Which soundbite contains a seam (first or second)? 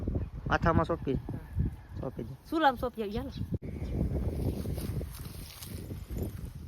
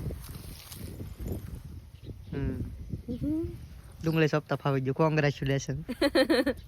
first